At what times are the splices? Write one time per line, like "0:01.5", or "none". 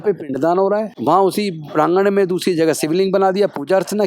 0:00.9